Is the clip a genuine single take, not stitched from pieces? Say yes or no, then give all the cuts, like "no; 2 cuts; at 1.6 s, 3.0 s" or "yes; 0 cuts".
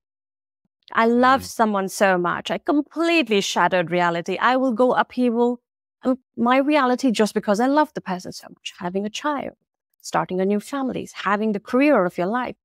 yes; 0 cuts